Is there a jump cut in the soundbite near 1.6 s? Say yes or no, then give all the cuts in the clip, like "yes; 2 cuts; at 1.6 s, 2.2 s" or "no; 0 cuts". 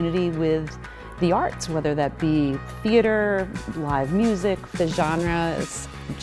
no; 1 cut; at 4.8 s